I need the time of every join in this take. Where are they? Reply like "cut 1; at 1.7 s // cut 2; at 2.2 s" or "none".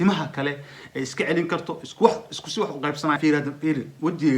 cut 1; at 3.2 s